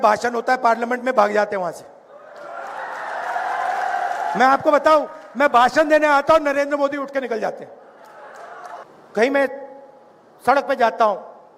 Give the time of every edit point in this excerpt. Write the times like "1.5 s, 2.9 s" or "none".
8.8 s